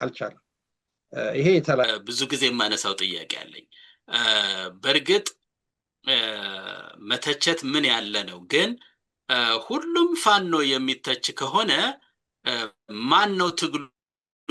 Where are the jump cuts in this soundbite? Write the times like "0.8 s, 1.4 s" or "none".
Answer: 1.8 s